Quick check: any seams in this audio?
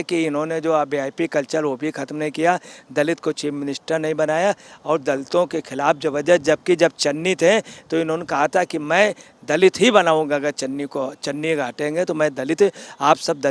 no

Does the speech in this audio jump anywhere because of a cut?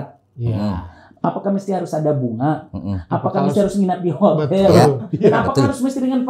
no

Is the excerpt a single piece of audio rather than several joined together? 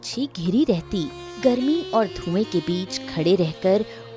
yes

